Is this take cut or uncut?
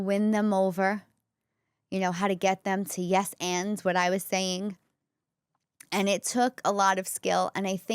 uncut